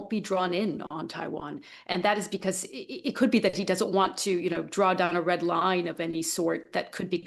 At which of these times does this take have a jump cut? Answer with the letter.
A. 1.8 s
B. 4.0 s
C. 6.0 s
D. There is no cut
D